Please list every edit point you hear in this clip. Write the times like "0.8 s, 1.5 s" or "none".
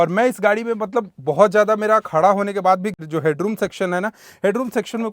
2.9 s